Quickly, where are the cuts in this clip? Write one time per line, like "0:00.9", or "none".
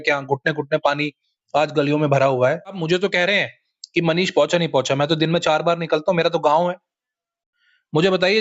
0:02.8

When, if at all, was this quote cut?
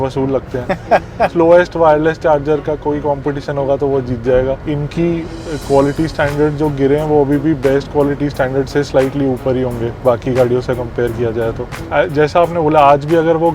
0:01.3
0:04.6
0:11.8

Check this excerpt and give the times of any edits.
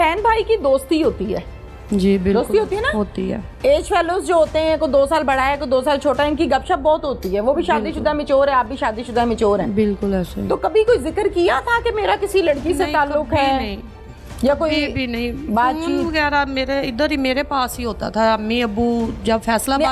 none

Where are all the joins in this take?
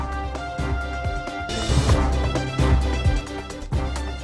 0:01.5

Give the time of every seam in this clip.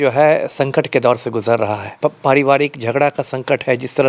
0:01.9

